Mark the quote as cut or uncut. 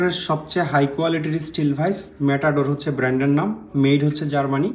uncut